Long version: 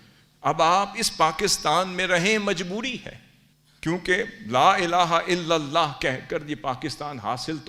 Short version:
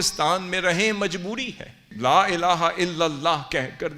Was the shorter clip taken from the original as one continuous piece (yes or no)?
no